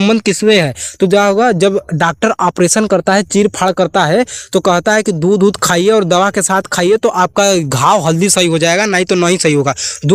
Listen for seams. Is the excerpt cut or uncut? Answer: uncut